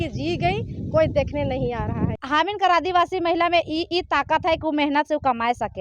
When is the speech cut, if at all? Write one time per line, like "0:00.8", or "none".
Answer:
0:02.2